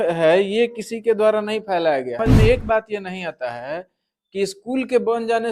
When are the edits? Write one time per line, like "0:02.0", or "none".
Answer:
0:02.3